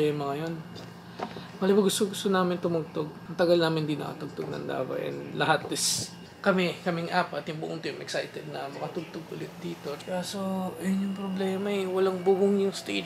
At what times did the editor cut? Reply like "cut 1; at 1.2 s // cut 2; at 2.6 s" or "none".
none